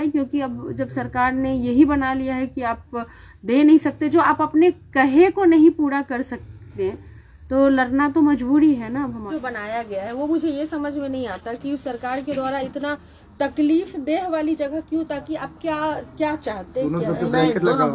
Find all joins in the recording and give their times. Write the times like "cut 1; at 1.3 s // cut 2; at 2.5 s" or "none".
cut 1; at 9.3 s